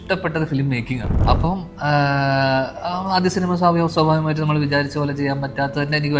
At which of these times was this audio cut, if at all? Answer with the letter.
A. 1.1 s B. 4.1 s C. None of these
A